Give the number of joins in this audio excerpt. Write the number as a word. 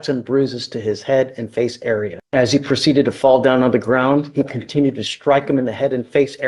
one